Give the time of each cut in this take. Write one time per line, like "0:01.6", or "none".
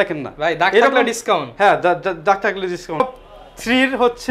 0:03.0